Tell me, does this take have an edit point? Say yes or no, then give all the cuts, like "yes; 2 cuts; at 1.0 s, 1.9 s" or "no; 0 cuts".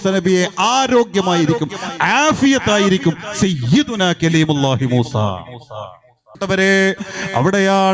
no; 0 cuts